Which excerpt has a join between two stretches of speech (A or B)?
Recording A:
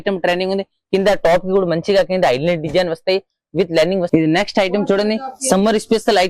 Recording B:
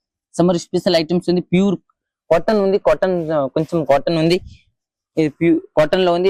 A